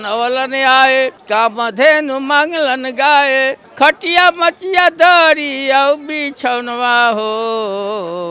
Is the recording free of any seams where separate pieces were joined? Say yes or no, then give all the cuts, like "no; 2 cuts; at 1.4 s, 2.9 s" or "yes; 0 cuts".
no; 2 cuts; at 1.2 s, 3.6 s